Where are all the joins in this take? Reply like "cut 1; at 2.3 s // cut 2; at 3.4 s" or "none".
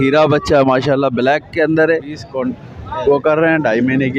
cut 1; at 2.3 s